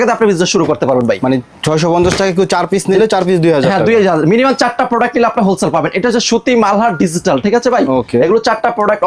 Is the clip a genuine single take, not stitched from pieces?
yes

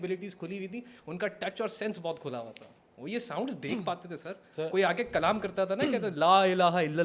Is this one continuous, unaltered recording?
yes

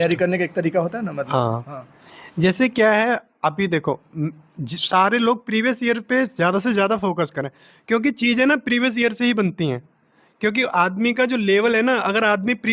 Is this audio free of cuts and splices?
yes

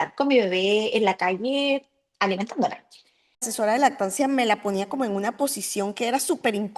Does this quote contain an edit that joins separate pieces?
yes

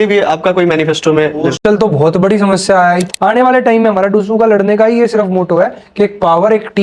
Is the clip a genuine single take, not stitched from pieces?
no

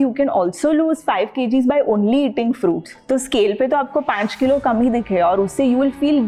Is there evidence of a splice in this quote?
no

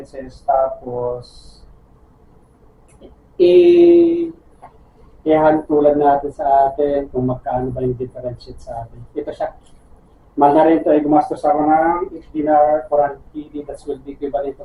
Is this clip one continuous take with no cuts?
yes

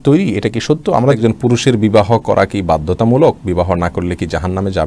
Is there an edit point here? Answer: yes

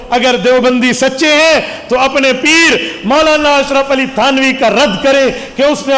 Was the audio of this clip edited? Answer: no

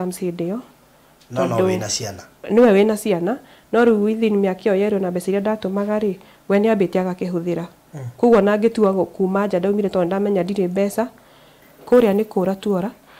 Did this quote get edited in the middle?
yes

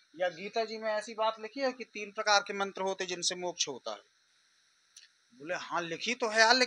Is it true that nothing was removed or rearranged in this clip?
yes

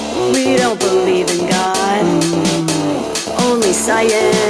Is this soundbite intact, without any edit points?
yes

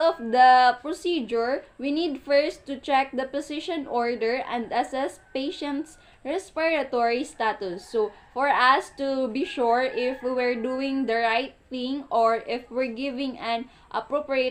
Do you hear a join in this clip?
no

